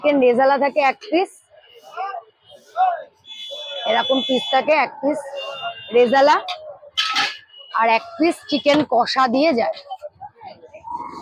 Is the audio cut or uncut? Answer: uncut